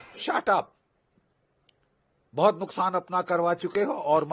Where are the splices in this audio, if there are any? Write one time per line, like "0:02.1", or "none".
none